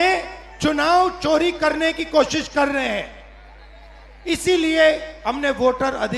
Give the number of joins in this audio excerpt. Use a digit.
0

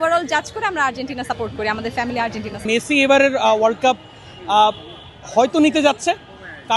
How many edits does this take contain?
1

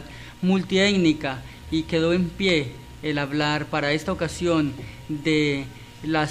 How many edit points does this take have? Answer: 1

